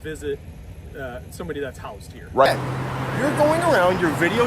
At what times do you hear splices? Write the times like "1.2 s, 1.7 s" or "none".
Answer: 2.5 s